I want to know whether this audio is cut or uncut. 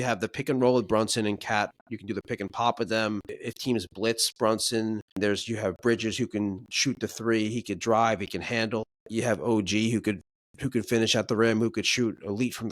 cut